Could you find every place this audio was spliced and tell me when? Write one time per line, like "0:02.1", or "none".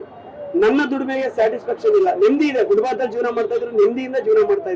none